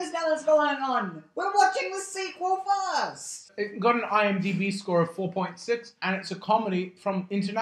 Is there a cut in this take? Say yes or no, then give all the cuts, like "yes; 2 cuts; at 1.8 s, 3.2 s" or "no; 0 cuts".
yes; 2 cuts; at 3.5 s, 5.9 s